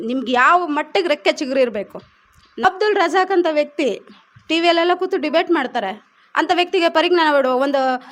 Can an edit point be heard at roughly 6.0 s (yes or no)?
no